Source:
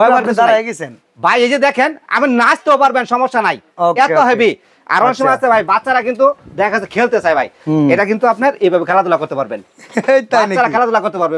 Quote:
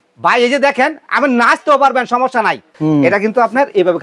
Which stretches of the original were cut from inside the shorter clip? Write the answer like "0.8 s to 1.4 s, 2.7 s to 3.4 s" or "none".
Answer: 3.7 s to 7.5 s

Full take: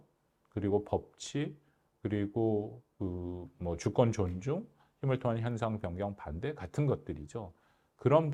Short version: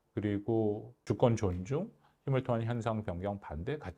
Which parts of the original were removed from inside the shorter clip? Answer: 2.9 s to 3.8 s

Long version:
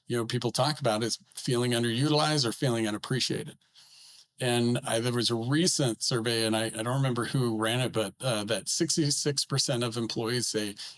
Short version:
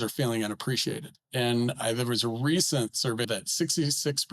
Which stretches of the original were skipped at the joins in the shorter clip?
3.6 s to 4.2 s, 6.3 s to 8.5 s

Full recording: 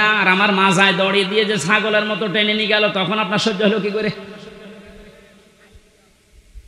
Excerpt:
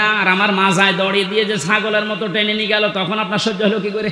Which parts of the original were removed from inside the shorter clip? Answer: none

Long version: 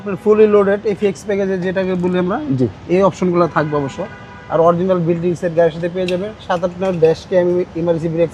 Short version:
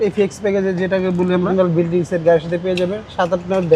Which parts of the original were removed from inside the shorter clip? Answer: 2.3 s to 4.8 s

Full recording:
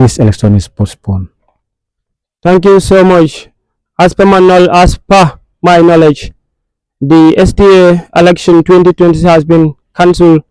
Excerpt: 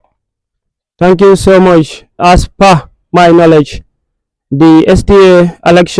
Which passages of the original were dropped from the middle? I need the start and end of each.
3.7 s to 4.7 s

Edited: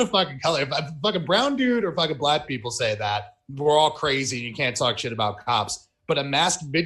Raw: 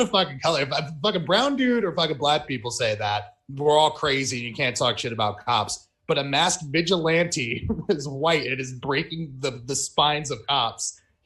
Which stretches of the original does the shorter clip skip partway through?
none

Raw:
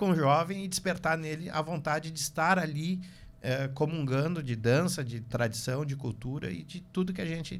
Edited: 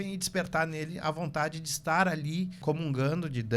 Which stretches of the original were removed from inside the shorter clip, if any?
3.1 s to 3.7 s

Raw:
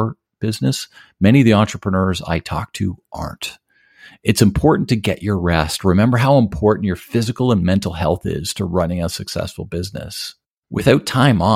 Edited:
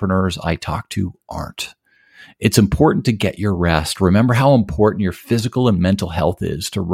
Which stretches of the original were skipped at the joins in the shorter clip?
none

